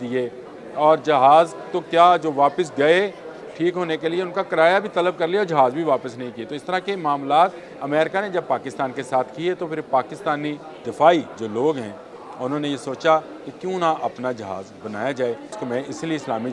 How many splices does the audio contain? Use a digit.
4